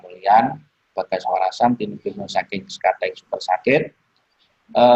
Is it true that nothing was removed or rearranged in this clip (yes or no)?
yes